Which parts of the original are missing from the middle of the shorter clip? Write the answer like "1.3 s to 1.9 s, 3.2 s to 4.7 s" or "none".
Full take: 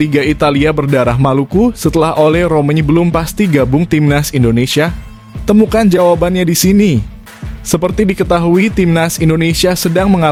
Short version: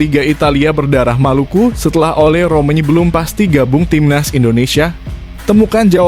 none